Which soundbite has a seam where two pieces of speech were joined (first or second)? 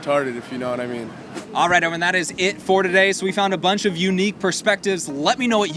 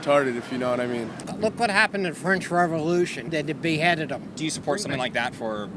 second